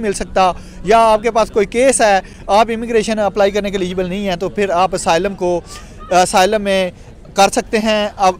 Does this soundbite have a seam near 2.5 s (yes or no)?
no